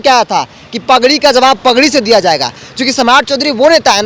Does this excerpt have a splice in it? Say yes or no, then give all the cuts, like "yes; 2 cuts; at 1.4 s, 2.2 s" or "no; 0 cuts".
no; 0 cuts